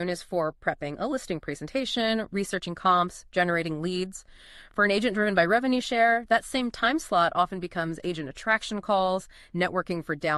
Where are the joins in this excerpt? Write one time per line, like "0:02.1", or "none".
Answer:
none